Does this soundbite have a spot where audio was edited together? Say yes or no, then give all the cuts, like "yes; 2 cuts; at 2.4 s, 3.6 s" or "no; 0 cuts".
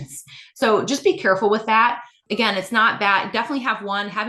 yes; 1 cut; at 2.2 s